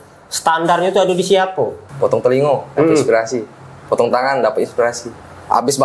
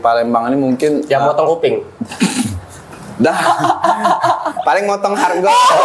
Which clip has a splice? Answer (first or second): first